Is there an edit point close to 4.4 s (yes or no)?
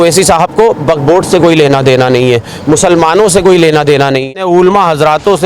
yes